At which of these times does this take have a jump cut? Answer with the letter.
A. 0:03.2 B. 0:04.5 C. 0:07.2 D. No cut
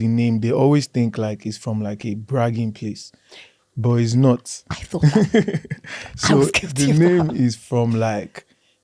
D